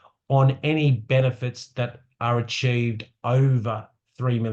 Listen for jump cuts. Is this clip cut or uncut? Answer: uncut